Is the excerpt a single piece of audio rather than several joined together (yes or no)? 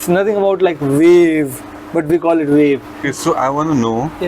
no